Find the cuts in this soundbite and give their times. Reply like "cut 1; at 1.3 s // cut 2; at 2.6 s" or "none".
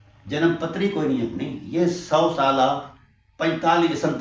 none